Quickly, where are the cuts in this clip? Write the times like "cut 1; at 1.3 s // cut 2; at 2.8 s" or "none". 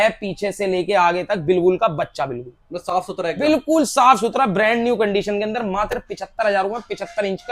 none